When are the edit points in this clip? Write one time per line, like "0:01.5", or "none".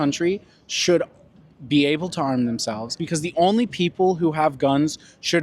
0:03.0